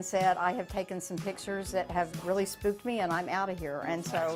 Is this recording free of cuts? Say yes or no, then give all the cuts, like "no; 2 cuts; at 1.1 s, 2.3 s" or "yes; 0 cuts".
yes; 0 cuts